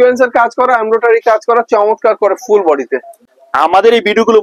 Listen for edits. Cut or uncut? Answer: cut